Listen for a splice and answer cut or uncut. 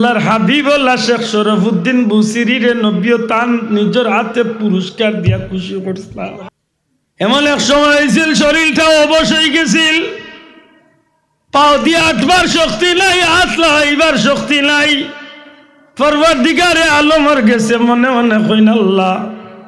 cut